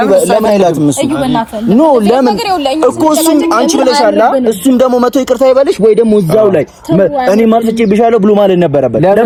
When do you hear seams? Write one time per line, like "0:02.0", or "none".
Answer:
none